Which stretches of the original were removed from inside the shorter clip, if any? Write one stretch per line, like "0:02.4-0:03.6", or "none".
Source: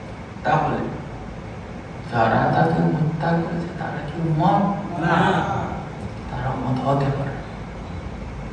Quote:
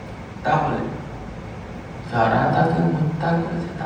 none